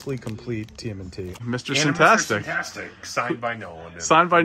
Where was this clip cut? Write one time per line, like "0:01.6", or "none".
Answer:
0:01.4

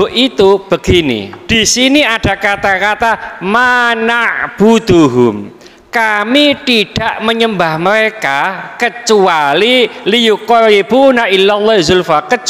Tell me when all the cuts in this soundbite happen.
0:01.3

